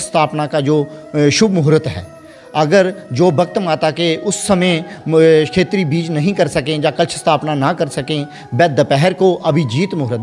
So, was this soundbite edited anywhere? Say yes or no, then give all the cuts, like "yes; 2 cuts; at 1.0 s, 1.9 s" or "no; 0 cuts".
no; 0 cuts